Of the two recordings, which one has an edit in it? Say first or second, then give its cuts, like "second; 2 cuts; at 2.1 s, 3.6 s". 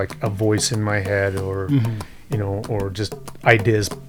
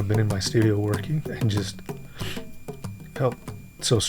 second; 1 cut; at 1.2 s